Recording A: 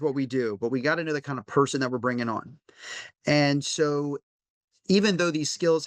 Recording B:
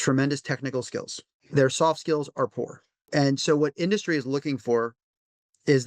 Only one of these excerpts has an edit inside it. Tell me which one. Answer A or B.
B